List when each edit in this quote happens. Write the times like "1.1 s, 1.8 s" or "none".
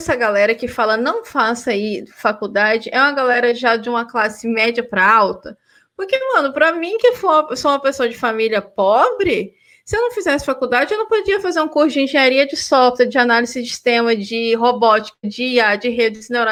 none